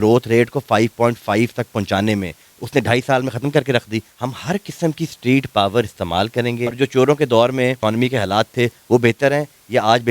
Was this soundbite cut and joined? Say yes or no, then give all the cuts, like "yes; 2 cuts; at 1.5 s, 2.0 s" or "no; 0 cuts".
yes; 2 cuts; at 4.1 s, 6.8 s